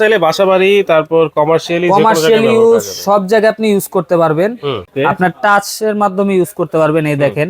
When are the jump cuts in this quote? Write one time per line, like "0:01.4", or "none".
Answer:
0:04.8